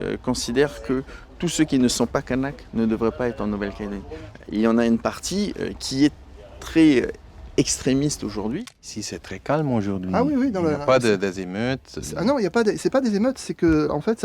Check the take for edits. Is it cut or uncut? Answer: cut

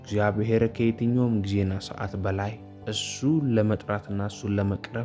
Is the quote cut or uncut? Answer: uncut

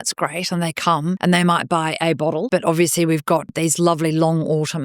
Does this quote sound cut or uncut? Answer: cut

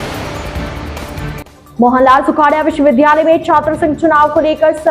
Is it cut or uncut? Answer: cut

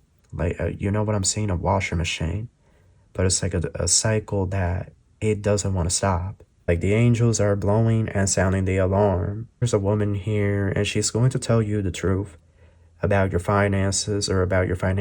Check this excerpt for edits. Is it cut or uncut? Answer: cut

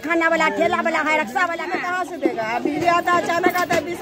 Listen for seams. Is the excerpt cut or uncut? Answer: cut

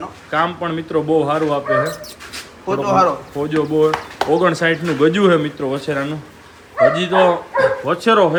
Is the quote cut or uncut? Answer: uncut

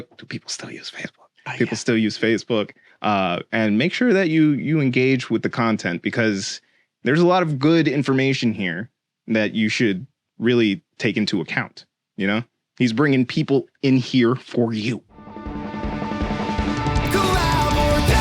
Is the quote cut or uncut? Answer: cut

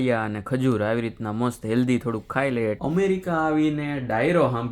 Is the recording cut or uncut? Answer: cut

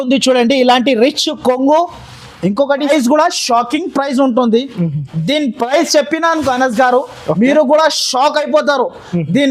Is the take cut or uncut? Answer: cut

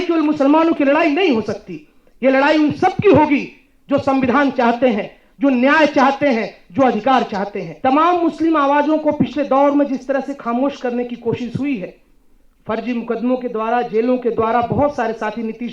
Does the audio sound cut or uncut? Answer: cut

